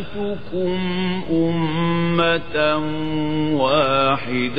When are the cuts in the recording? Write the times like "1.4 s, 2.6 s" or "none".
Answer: none